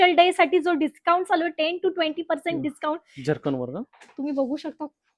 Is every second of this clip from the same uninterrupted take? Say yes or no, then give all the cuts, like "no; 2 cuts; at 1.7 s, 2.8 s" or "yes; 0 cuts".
yes; 0 cuts